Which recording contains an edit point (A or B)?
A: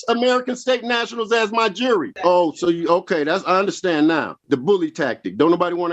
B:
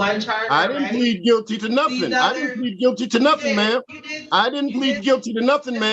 A